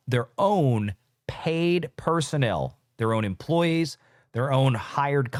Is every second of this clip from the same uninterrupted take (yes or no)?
yes